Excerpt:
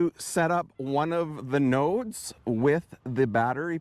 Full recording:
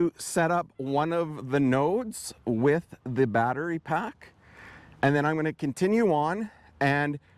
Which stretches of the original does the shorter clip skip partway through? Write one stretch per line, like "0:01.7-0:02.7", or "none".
none